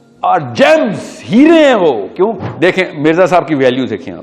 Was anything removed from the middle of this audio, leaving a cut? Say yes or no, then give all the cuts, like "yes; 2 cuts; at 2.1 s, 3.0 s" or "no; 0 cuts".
yes; 1 cut; at 2.4 s